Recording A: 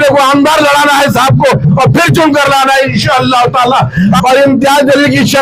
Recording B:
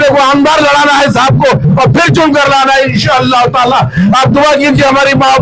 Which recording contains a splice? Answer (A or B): A